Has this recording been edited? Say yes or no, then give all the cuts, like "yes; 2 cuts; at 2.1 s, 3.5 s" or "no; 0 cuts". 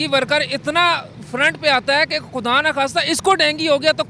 no; 0 cuts